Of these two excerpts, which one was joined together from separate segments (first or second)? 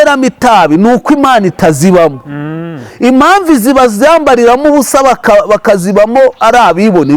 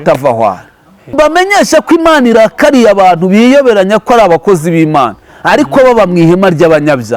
second